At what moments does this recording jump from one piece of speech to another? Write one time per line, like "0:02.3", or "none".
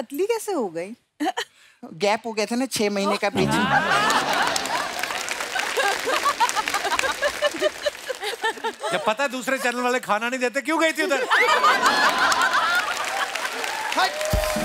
none